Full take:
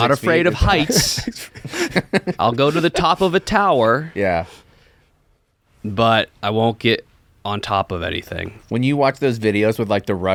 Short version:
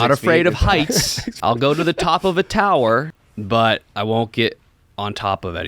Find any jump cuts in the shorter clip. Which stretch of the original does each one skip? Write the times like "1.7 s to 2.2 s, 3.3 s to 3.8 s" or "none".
1.3 s to 2.3 s, 4.1 s to 5.6 s